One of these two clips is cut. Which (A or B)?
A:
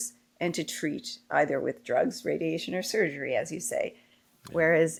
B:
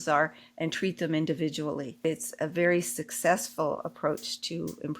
B